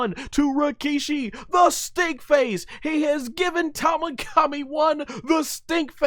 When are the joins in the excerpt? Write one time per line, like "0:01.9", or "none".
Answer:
none